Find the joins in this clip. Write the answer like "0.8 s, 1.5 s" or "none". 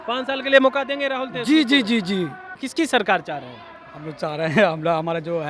2.6 s